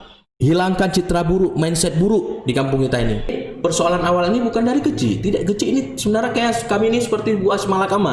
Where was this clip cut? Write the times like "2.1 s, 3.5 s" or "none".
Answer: 3.4 s